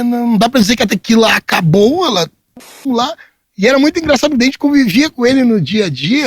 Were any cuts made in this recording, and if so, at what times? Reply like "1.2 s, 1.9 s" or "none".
2.9 s